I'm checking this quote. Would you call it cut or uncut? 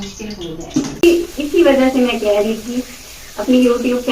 cut